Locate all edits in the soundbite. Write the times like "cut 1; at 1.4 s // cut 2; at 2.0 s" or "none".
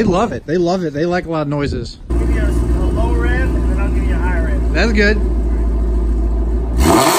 cut 1; at 2.1 s